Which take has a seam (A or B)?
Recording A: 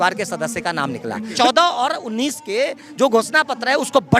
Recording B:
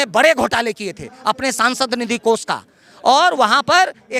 A